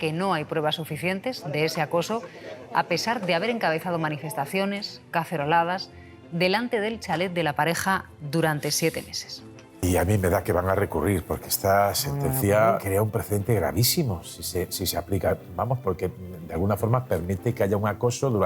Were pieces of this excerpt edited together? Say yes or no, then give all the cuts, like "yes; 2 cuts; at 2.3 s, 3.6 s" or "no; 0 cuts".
yes; 2 cuts; at 9.8 s, 12.8 s